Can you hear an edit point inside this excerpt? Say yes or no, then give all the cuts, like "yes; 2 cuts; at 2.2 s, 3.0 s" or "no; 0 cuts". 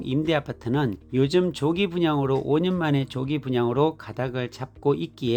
no; 0 cuts